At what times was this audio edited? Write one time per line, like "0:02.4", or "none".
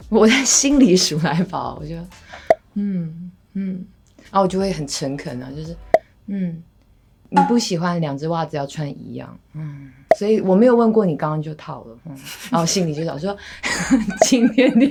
none

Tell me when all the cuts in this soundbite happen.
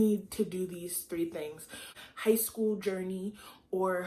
0:01.9

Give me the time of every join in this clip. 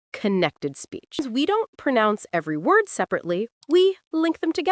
0:01.2

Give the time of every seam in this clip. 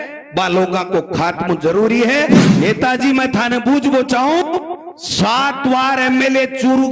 0:02.4

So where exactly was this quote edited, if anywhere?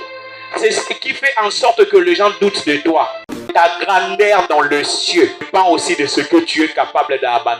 0:03.5

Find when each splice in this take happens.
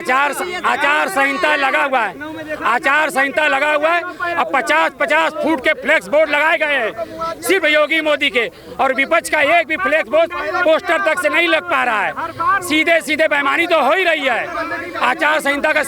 none

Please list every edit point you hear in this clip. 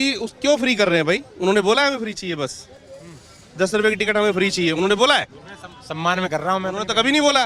none

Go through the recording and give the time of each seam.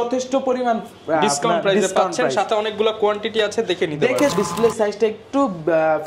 0:04.3

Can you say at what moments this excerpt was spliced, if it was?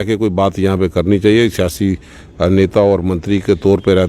none

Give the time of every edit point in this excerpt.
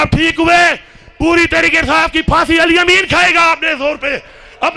none

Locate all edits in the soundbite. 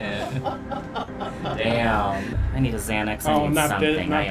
0:02.4

